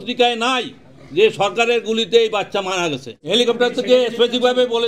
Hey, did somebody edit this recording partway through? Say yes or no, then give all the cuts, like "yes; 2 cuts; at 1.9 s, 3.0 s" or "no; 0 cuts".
yes; 1 cut; at 3.1 s